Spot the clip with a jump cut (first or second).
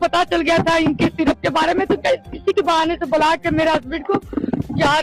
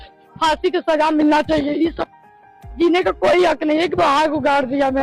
second